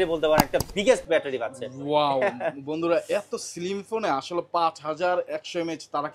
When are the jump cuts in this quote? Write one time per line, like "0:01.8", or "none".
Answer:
none